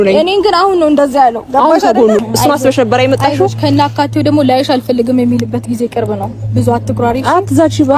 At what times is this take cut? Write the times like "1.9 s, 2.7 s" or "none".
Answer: 2.2 s